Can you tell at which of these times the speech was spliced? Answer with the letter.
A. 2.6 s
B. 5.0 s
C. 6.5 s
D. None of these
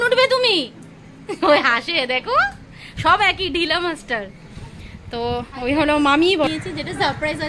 C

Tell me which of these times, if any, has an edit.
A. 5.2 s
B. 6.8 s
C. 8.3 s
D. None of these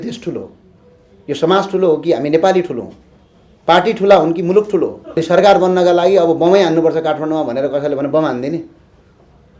A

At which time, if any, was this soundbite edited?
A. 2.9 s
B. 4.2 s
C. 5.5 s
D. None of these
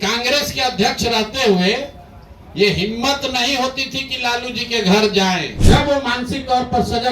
C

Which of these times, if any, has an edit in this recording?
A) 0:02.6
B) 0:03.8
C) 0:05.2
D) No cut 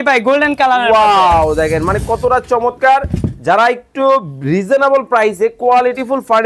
D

